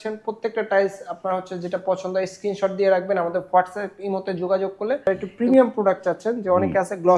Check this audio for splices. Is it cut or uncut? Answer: cut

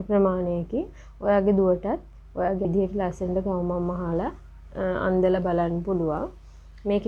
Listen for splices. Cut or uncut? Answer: cut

